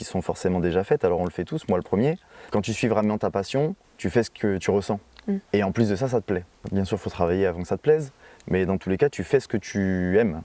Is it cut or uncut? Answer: cut